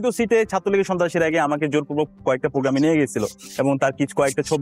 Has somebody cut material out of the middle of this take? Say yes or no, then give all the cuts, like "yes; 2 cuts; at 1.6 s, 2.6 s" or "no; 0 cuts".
no; 0 cuts